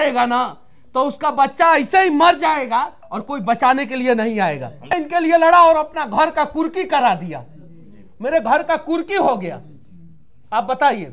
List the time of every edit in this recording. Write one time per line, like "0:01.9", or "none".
0:04.9